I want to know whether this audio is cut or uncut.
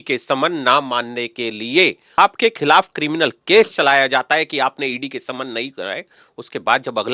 cut